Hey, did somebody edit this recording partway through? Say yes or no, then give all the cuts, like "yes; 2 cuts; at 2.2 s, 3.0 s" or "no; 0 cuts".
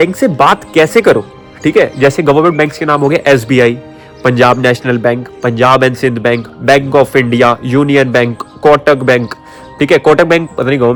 no; 0 cuts